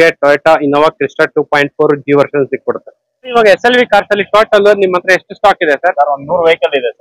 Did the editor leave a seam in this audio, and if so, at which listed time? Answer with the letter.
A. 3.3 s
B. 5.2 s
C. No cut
A